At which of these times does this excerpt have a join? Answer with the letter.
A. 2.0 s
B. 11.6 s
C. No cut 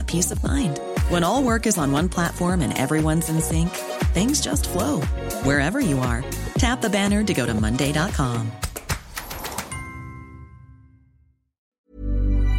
B